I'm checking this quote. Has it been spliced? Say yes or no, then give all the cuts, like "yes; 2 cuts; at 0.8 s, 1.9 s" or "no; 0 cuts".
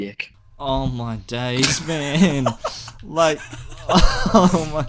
no; 0 cuts